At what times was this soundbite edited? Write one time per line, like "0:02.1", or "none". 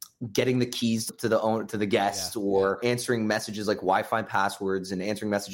0:01.1
0:02.8